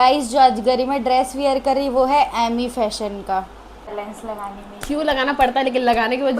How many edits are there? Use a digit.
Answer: 1